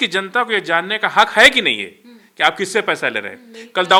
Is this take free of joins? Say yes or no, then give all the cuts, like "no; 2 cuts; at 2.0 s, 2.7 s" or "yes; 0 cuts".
yes; 0 cuts